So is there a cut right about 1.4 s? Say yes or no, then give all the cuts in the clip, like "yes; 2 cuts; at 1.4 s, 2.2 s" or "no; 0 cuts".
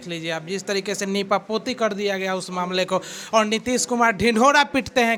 no; 0 cuts